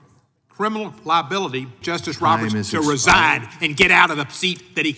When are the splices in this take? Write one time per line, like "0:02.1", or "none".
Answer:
0:01.8

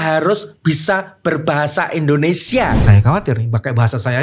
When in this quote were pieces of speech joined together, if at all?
0:02.8

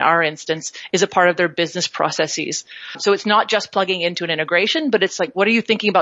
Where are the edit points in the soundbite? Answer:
0:03.0

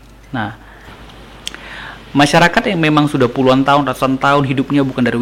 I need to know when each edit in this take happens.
0:00.9

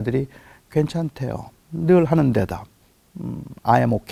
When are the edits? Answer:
none

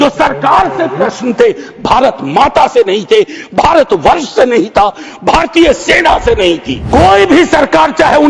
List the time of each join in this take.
0:06.7

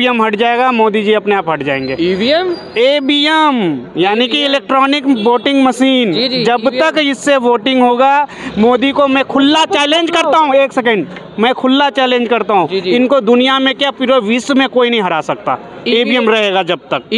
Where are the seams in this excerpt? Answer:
none

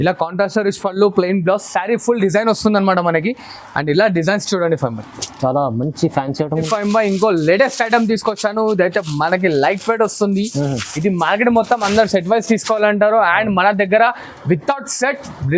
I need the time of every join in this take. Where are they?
0:06.7

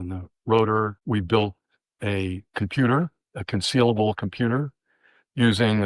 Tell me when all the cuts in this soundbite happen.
0:01.0
0:02.4

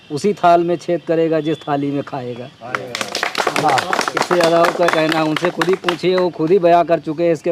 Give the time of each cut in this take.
none

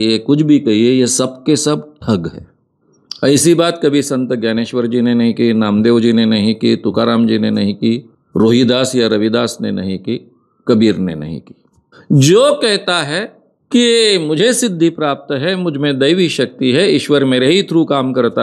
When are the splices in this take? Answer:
0:08.2

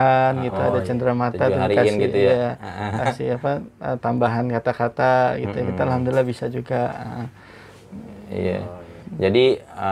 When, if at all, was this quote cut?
none

